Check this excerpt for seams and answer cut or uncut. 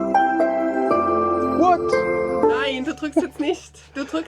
cut